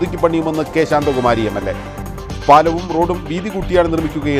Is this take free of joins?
yes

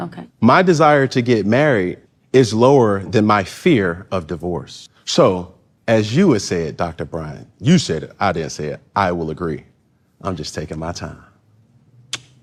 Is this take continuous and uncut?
yes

